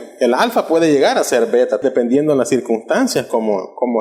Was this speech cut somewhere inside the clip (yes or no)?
yes